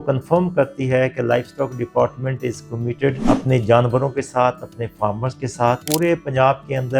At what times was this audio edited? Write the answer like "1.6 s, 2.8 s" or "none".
3.2 s, 5.8 s